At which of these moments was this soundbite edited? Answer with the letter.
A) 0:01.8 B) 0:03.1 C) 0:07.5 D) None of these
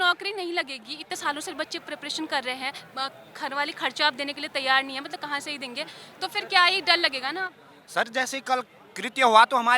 D